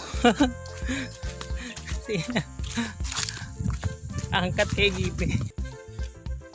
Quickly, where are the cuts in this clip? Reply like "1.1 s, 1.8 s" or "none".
5.5 s

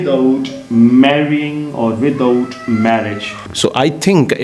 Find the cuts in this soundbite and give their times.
3.4 s

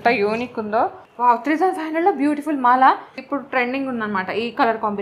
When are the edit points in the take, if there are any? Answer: 1.0 s, 3.1 s

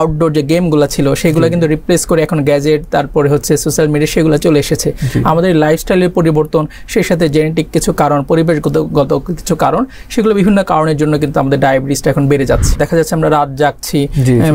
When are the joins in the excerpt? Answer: 12.8 s

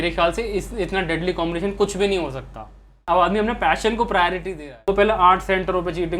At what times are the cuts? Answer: 3.0 s, 4.9 s

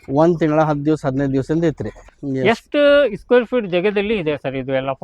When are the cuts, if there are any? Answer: 2.1 s

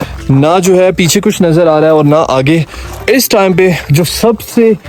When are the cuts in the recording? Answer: none

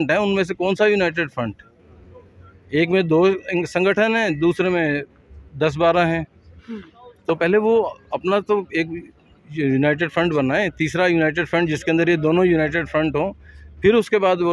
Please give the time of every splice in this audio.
none

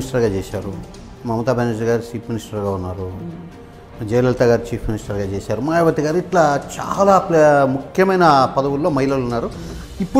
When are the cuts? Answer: none

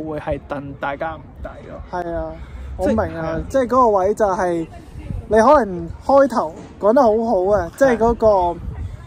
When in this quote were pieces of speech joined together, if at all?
none

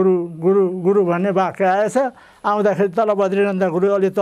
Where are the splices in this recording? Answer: none

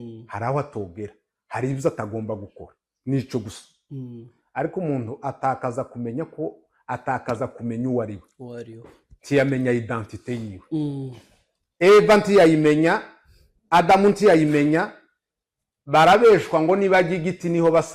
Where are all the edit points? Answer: none

